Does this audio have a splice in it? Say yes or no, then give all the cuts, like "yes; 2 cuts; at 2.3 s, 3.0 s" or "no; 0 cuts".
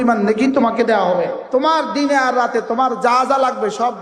yes; 1 cut; at 1.4 s